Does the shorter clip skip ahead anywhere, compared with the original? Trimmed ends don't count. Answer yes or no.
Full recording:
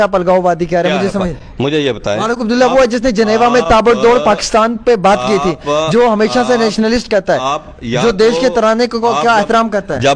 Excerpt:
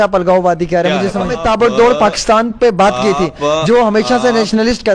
yes